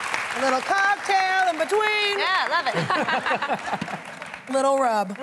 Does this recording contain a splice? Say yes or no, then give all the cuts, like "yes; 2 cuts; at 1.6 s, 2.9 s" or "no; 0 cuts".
yes; 1 cut; at 1.9 s